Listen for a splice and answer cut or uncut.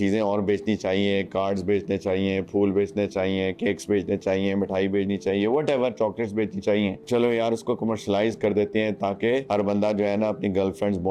uncut